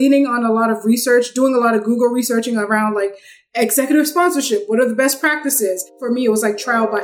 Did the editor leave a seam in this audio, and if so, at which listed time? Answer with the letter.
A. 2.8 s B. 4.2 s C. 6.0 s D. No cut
C